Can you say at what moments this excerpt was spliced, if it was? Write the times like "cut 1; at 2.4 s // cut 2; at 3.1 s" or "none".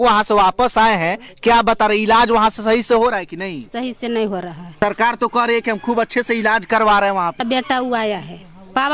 cut 1; at 4.8 s // cut 2; at 7.4 s